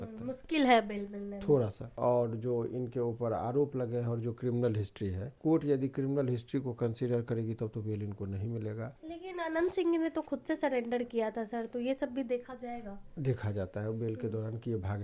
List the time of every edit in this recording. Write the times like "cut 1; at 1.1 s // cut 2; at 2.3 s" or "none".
cut 1; at 1.9 s // cut 2; at 5.3 s // cut 3; at 9.0 s